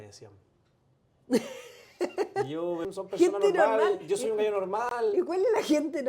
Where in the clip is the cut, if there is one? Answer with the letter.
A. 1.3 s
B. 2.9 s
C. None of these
B